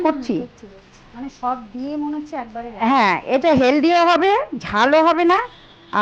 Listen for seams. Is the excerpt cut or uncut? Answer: uncut